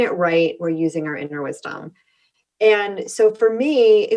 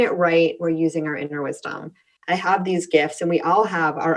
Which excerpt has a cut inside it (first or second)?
second